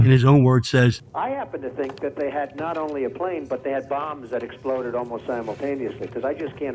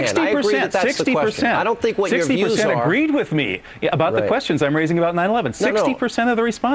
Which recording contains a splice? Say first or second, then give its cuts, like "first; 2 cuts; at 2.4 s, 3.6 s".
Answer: first; 1 cut; at 1.0 s